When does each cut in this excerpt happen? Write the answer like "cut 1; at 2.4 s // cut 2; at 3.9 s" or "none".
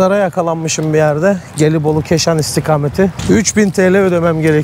cut 1; at 3.2 s